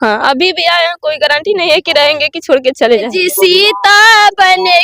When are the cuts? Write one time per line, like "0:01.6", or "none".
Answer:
0:03.1